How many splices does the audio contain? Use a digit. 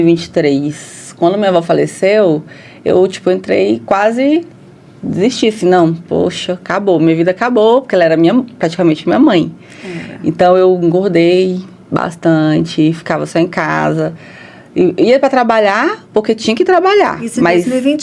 0